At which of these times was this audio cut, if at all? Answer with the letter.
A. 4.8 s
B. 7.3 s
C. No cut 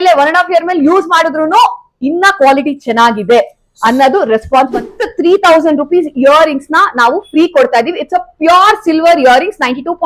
A